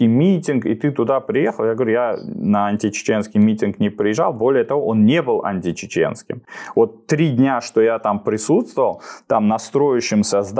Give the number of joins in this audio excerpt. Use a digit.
0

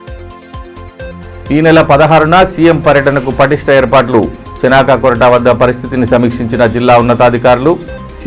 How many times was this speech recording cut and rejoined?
1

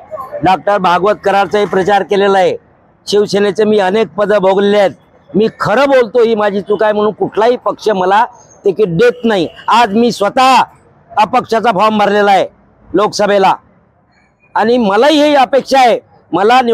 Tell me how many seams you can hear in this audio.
0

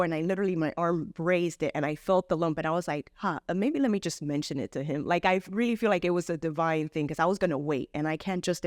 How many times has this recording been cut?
0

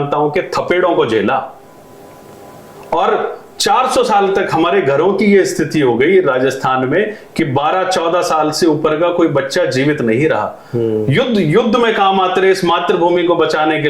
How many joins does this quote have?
0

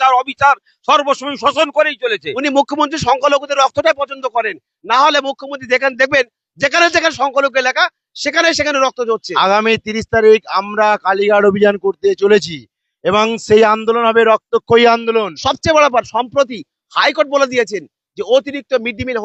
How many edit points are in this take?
3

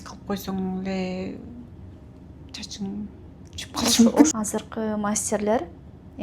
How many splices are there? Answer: 1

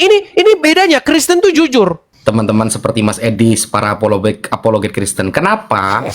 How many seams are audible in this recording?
1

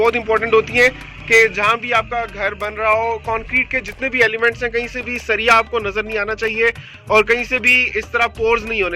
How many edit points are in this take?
0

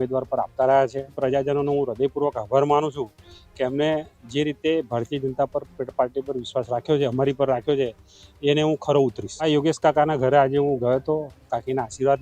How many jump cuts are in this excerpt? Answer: 2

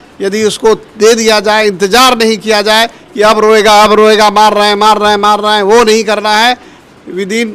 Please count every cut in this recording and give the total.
0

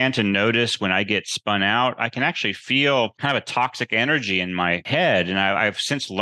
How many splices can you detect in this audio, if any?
2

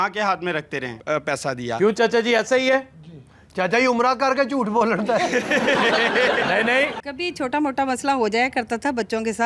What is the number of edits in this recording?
2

